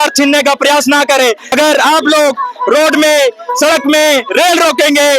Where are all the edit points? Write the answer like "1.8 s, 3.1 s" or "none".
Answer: 1.5 s

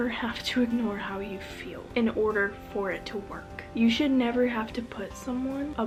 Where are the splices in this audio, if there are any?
none

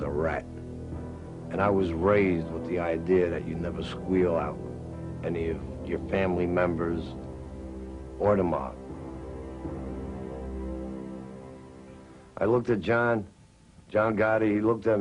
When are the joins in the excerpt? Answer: none

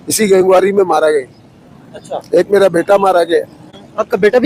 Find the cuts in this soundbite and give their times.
none

